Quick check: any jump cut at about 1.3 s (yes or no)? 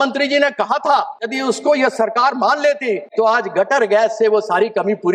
yes